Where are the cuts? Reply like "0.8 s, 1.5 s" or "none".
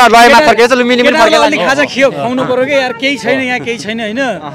none